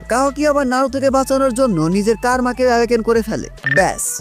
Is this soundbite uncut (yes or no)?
yes